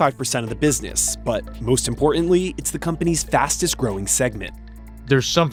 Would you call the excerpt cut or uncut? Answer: uncut